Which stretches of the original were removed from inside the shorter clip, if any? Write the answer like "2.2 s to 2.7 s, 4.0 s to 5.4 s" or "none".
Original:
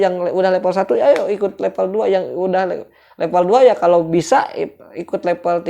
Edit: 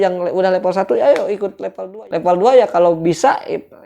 1.8 s to 2.9 s